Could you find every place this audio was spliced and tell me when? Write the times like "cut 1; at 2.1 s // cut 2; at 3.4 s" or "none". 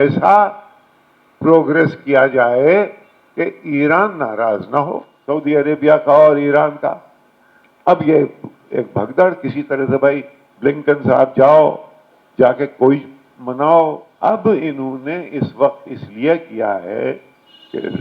cut 1; at 5.1 s // cut 2; at 14.1 s